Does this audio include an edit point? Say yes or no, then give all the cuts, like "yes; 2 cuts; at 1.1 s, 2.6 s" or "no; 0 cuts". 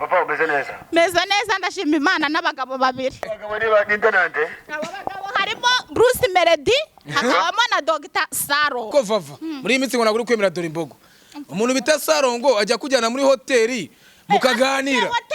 yes; 2 cuts; at 3.4 s, 8.9 s